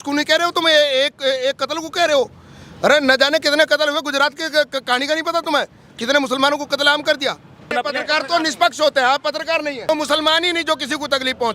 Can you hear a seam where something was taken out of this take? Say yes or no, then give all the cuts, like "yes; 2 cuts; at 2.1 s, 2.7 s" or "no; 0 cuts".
yes; 2 cuts; at 7.7 s, 9.9 s